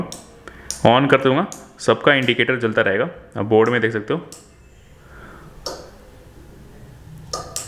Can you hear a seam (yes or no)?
no